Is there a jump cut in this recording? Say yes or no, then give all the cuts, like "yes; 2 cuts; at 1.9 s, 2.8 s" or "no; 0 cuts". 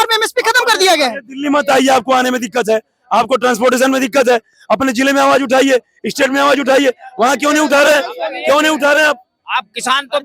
no; 0 cuts